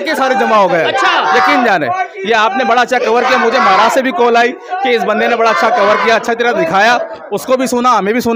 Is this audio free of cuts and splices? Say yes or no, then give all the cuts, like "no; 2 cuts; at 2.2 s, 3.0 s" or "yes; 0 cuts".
yes; 0 cuts